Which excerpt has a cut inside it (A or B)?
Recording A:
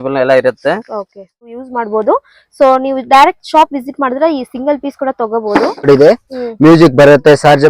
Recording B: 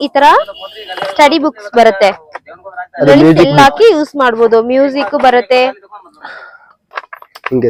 A